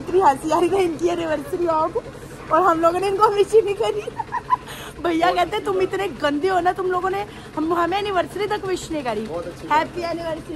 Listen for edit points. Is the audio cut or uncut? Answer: uncut